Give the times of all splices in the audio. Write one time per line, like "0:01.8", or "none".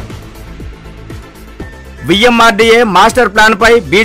0:01.9